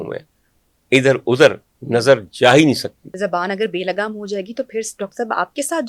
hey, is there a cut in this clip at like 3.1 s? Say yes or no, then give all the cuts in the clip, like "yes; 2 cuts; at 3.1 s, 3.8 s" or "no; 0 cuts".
yes; 1 cut; at 3.1 s